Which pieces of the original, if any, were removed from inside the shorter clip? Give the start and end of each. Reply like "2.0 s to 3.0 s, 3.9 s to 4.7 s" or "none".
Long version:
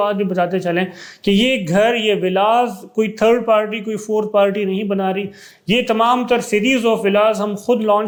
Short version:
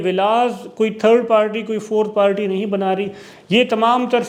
none